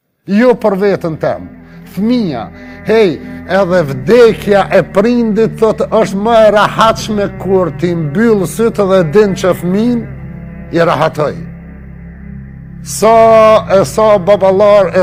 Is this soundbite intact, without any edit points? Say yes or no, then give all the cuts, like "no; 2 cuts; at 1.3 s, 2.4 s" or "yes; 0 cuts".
yes; 0 cuts